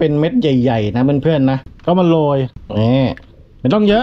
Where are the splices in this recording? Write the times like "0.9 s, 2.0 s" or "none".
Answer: 1.7 s, 2.6 s